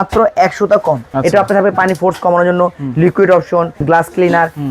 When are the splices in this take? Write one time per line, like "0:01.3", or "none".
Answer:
0:01.1
0:03.8